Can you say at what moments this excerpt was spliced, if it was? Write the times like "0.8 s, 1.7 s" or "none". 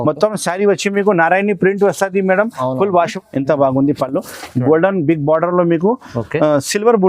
3.1 s